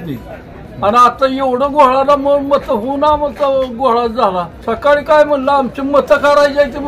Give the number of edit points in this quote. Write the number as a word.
one